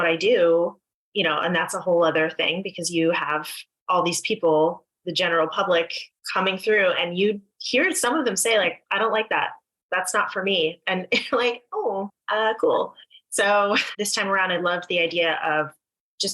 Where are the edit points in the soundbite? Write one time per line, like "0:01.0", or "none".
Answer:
0:12.2
0:14.0

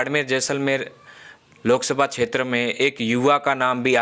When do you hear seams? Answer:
none

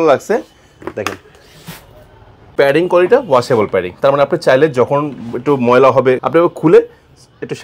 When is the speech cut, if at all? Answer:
0:02.5
0:06.2

